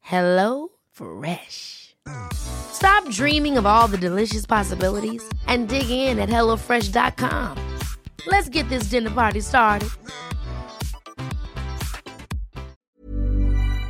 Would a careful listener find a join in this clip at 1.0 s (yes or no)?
no